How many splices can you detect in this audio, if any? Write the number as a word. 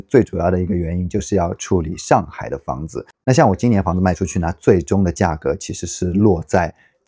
one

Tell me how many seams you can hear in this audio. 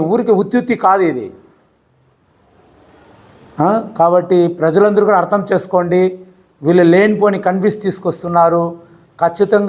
zero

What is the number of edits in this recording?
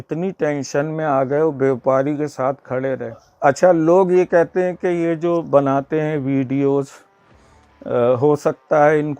one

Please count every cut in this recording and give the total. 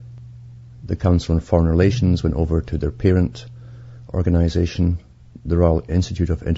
one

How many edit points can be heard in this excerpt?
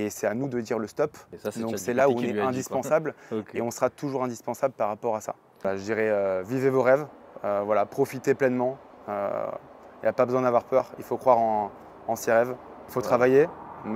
three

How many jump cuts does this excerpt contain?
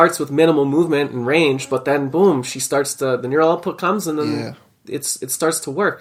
zero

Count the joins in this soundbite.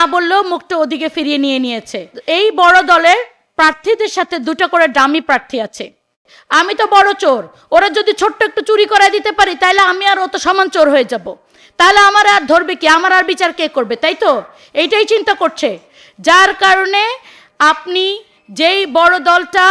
two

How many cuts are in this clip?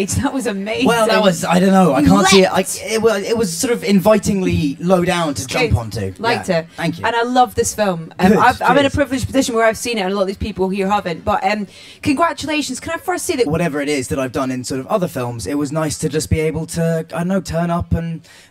zero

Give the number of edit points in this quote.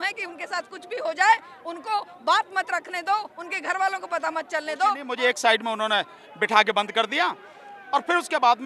one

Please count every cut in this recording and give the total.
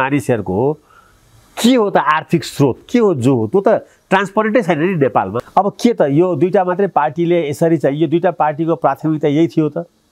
one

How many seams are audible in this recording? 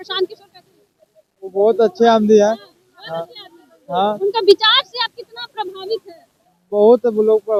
zero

